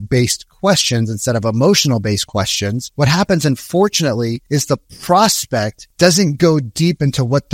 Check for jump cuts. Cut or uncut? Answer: cut